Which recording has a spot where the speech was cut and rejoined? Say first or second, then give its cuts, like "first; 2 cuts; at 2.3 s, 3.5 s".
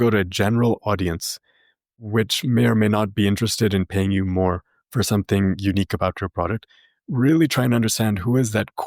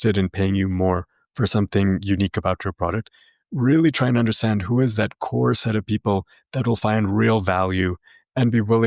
first; 1 cut; at 2.0 s